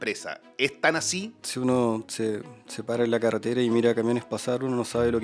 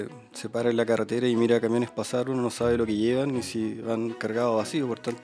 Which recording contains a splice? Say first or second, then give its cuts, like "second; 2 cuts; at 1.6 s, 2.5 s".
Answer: first; 1 cut; at 1.4 s